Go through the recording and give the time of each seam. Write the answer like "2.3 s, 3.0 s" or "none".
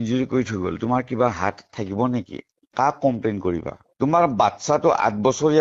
none